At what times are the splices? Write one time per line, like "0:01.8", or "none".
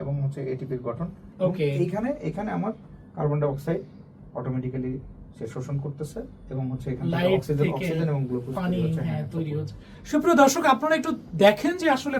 0:01.2